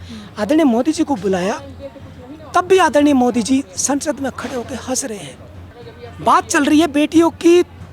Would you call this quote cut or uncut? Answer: uncut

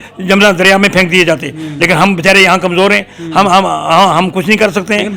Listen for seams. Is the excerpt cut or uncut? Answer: uncut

